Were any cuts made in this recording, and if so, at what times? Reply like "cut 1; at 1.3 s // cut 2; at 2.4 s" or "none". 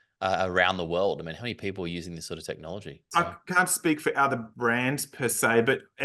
cut 1; at 3.0 s

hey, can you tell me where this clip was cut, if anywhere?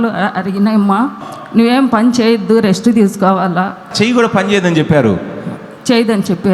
cut 1; at 1.2 s // cut 2; at 3.9 s

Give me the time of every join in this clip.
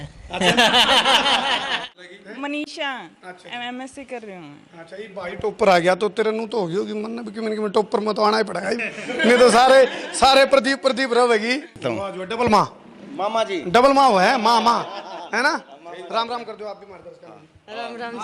cut 1; at 1.9 s // cut 2; at 11.8 s

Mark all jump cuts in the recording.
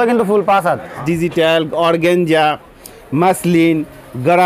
cut 1; at 1.0 s

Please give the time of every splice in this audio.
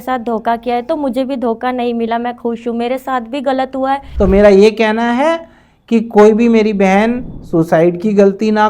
cut 1; at 4.0 s

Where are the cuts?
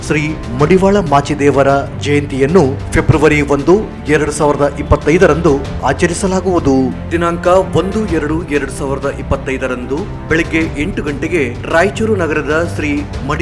cut 1; at 7.1 s

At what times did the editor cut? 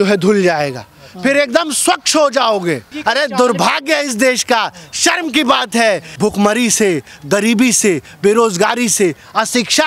cut 1; at 2.9 s // cut 2; at 6.1 s

